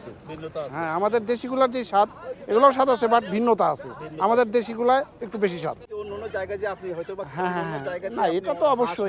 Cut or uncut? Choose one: uncut